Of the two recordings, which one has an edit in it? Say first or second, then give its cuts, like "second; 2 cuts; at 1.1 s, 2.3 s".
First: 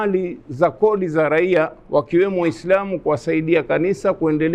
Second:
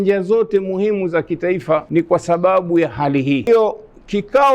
second; 2 cuts; at 1.9 s, 3.5 s